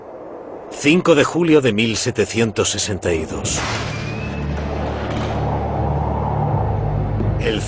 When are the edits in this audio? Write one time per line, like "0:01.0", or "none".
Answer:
none